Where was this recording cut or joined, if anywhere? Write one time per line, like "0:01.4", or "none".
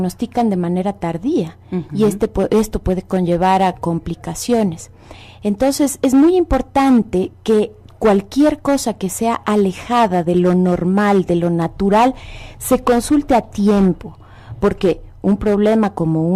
0:13.0